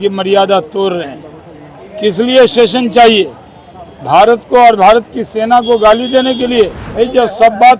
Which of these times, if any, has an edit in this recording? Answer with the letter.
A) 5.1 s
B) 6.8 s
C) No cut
B